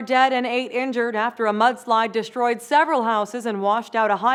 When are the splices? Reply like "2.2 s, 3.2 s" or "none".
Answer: none